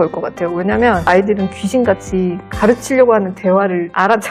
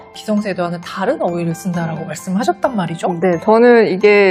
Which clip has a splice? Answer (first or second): second